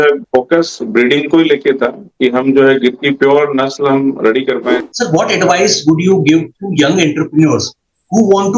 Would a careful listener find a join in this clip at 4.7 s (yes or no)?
yes